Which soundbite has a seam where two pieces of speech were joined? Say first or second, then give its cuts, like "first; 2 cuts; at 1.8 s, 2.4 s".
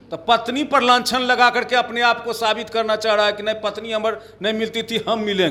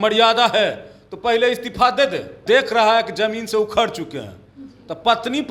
second; 1 cut; at 2.4 s